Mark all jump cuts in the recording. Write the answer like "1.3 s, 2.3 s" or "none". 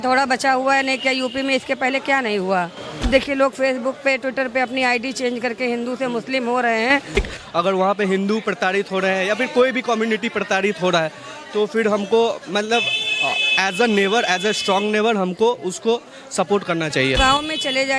3.1 s, 7.2 s, 17.2 s